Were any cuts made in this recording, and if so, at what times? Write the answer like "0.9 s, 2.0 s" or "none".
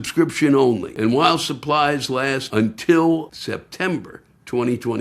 0.9 s, 2.4 s, 3.3 s